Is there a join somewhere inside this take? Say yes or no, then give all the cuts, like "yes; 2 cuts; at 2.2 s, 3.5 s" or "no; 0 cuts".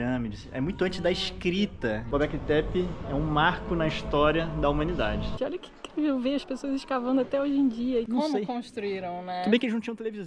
yes; 3 cuts; at 2.0 s, 5.3 s, 8.1 s